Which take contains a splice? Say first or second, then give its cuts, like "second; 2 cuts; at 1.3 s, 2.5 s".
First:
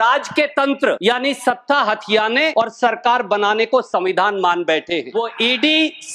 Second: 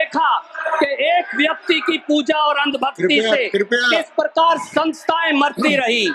first; 3 cuts; at 1.0 s, 2.5 s, 5.1 s